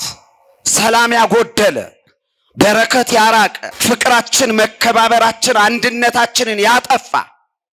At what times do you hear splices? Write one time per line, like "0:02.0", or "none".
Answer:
0:03.7